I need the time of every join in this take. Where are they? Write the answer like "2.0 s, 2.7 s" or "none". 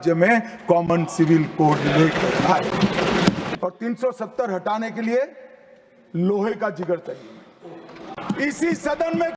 3.5 s, 8.2 s